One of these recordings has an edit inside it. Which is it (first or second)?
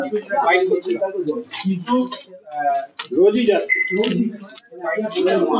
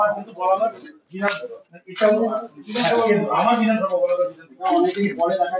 second